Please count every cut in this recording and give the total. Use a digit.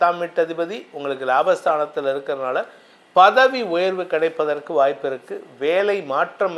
0